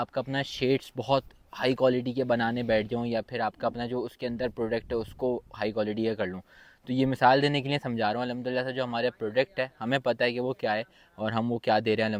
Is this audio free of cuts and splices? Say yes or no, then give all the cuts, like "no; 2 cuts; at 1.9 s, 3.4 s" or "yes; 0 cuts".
yes; 0 cuts